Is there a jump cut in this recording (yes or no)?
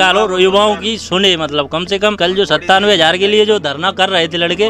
yes